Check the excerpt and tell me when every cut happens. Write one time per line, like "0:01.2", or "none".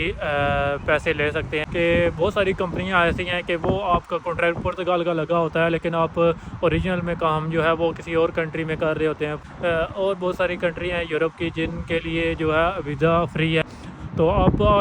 0:01.6
0:09.4
0:13.6